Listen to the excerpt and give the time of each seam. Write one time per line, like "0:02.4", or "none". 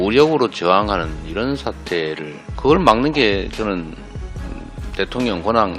0:02.4